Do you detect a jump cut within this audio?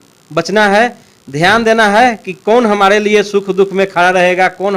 no; 0 cuts

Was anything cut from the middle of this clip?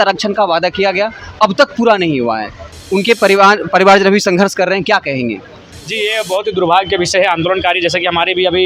no; 0 cuts

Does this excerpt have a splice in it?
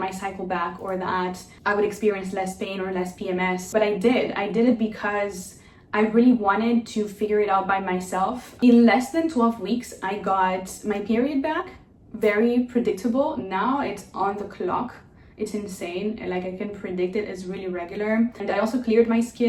no; 0 cuts

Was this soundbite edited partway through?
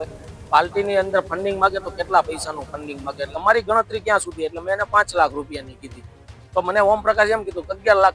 yes; 1 cut; at 3.3 s

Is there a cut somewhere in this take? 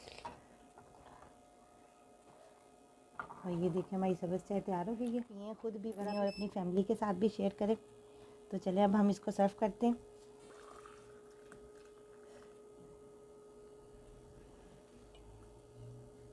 yes; 1 cut; at 5.6 s

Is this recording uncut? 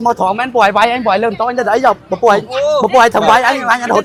yes; 0 cuts

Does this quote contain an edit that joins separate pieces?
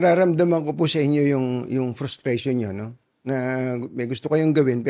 no; 0 cuts

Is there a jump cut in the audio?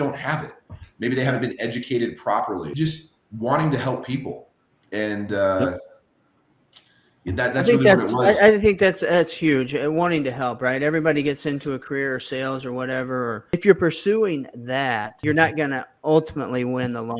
yes; 3 cuts; at 2.7 s, 13.5 s, 15.1 s

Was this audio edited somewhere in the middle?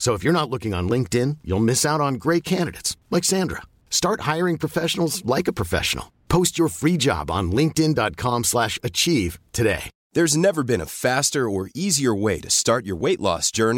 yes; 1 cut; at 9.9 s

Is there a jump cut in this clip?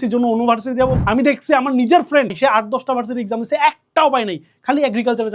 yes; 2 cuts; at 1.0 s, 2.3 s

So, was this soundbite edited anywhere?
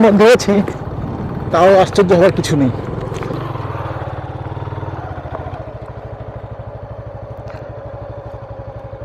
yes; 1 cut; at 3.3 s

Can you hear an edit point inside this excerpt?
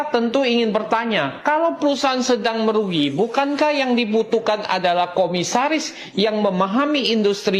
no; 0 cuts

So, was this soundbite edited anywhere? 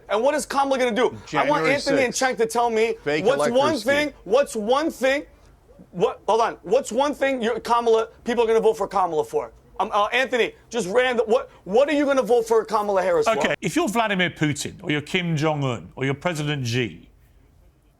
yes; 1 cut; at 13.5 s

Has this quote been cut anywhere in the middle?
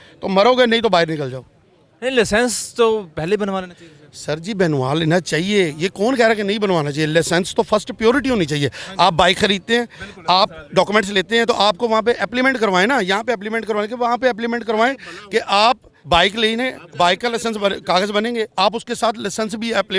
no; 0 cuts

